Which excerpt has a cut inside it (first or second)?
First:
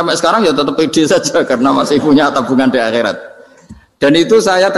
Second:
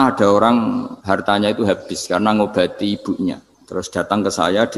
second